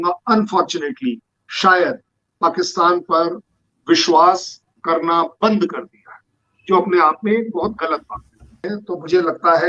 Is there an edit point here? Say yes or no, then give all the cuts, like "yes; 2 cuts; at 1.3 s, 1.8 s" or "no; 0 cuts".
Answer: no; 0 cuts